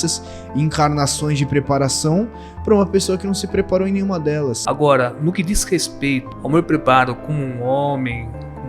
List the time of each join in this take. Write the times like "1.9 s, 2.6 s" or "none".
4.6 s, 6.3 s